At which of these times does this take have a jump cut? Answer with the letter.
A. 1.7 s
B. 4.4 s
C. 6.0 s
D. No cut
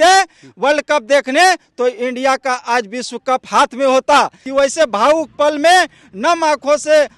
B